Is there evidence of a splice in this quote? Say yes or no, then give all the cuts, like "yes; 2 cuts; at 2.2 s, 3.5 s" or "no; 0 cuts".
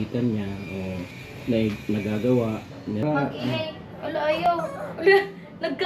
yes; 1 cut; at 3.0 s